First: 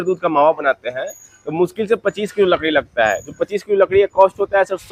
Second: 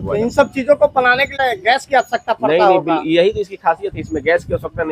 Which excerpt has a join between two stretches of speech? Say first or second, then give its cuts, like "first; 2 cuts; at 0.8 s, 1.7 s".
second; 1 cut; at 1.4 s